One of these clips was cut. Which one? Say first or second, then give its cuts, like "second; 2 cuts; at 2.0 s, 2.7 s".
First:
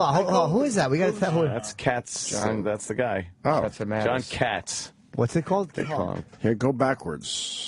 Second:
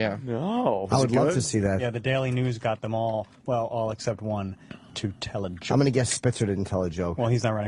first; 1 cut; at 4.5 s